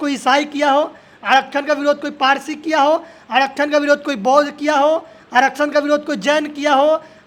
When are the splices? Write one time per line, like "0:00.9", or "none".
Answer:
none